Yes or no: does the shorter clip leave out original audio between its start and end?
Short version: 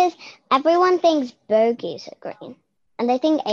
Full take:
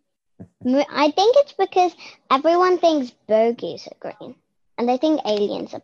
no